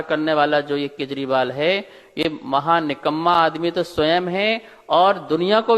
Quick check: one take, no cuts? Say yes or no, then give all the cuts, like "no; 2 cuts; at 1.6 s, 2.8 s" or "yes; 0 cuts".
yes; 0 cuts